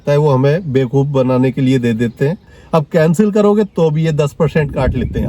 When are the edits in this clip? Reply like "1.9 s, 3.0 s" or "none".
2.5 s